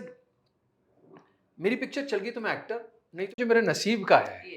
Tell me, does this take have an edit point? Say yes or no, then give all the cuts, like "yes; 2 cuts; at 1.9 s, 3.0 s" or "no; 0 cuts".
yes; 1 cut; at 3.4 s